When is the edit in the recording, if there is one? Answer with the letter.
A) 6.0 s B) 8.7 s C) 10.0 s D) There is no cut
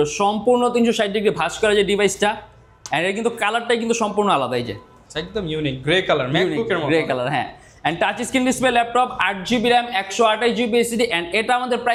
D